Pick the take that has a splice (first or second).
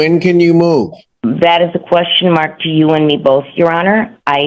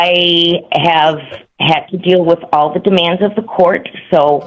first